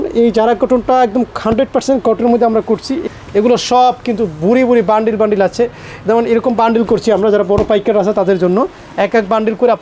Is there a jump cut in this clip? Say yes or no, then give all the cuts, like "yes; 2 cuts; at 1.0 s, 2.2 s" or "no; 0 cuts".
no; 0 cuts